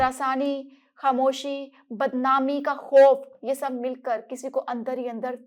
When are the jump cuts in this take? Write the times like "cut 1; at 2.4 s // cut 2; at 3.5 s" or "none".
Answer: none

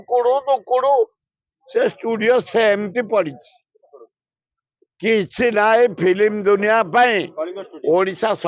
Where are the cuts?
none

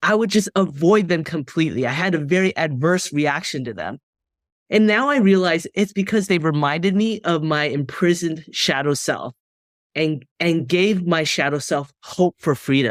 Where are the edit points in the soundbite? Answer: none

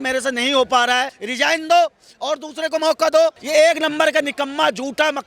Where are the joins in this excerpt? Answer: cut 1; at 1.2 s // cut 2; at 3.4 s

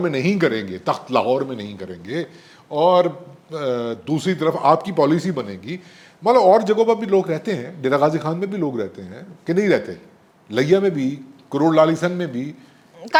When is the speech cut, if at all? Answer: none

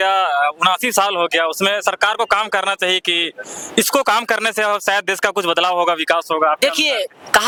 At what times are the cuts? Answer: none

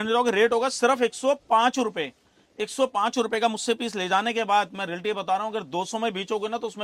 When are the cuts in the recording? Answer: none

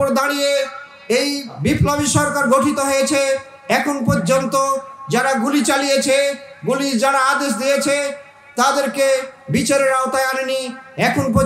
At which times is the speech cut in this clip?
cut 1; at 1.5 s

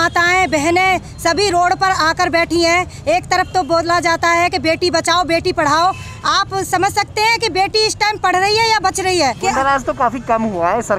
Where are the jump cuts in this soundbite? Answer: cut 1; at 9.4 s

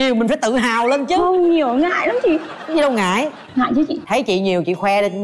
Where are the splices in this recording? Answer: none

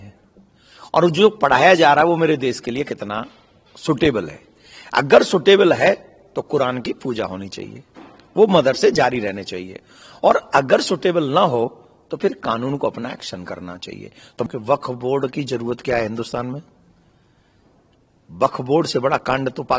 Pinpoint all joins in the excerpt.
cut 1; at 14.5 s

